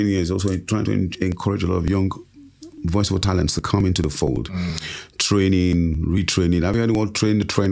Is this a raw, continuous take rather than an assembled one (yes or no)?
yes